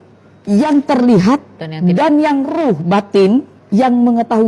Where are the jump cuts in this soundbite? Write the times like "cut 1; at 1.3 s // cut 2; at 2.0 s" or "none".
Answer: cut 1; at 3.6 s